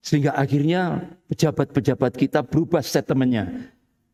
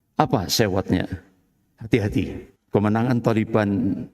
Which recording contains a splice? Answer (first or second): second